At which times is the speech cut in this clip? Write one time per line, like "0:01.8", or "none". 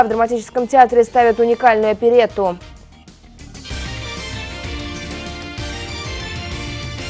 0:03.1